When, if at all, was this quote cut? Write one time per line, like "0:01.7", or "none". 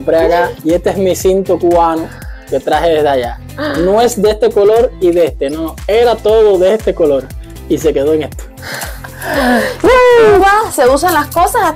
none